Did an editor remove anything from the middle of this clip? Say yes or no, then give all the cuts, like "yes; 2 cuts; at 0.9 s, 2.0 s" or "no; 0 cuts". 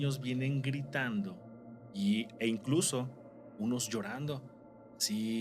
no; 0 cuts